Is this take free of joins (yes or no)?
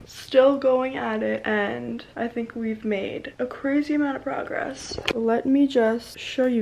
yes